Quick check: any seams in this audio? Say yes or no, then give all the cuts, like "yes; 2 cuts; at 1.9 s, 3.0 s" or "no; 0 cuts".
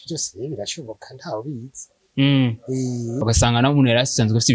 yes; 1 cut; at 3.2 s